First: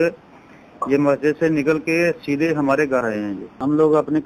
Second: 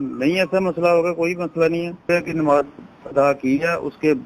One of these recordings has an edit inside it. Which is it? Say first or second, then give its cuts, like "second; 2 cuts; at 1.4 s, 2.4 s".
second; 1 cut; at 2.0 s